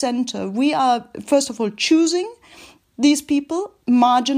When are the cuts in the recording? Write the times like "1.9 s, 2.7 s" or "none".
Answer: none